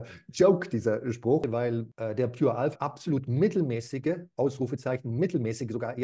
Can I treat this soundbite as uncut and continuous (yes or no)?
no